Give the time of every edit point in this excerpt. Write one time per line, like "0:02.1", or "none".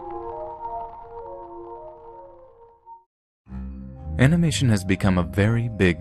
none